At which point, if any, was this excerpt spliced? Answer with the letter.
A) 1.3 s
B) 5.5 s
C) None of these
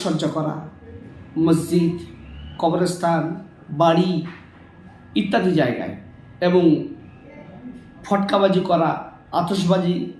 C